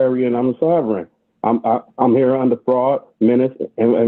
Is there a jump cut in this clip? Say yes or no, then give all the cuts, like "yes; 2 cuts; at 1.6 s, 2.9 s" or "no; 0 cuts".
no; 0 cuts